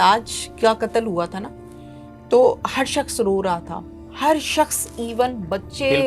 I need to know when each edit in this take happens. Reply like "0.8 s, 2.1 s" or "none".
none